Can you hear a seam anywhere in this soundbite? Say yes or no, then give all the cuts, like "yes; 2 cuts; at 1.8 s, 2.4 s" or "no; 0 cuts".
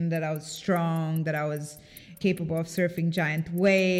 yes; 1 cut; at 2.2 s